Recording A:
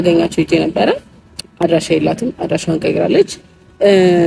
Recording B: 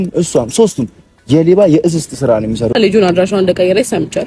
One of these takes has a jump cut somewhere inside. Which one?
B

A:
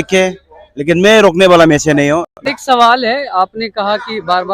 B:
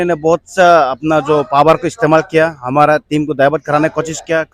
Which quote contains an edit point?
A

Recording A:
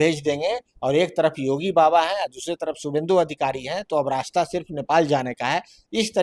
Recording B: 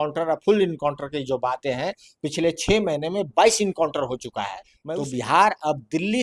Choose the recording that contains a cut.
B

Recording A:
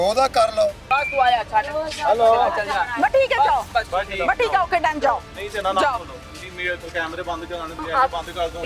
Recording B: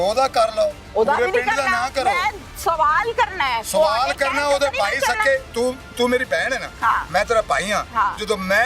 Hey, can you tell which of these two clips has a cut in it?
A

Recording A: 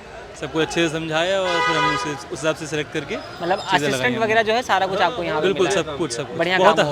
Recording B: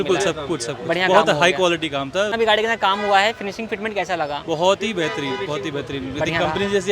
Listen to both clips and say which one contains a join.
B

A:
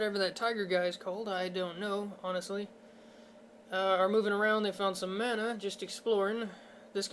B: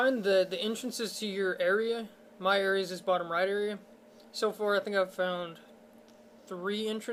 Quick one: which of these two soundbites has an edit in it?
A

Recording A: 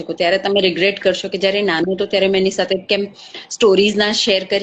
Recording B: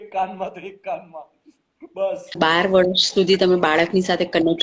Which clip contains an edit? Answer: B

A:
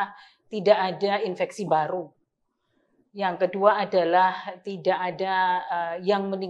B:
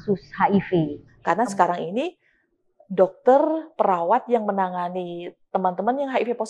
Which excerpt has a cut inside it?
B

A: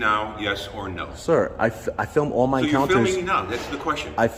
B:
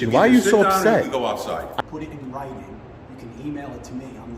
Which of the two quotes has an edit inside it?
B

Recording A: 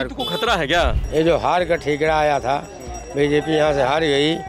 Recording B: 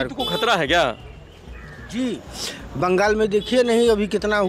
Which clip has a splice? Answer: A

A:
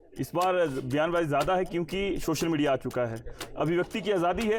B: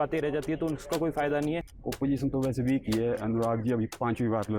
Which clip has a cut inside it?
B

